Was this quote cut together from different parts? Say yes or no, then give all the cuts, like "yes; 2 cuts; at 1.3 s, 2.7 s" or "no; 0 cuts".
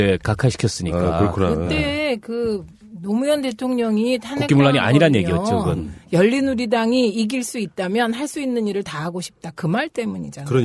no; 0 cuts